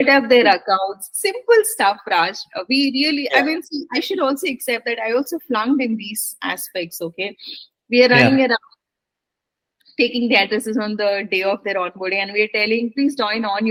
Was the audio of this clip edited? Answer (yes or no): no